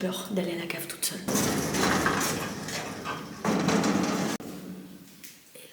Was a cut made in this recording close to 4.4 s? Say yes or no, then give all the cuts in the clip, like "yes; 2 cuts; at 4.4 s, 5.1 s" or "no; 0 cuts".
yes; 2 cuts; at 1.3 s, 4.4 s